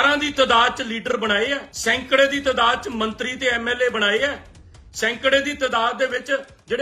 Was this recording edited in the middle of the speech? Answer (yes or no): yes